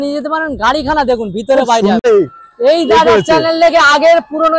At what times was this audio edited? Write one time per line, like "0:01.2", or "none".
0:02.0